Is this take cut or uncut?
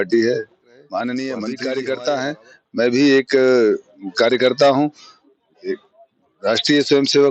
cut